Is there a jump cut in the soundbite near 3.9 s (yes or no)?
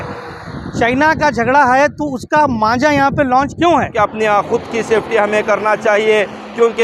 yes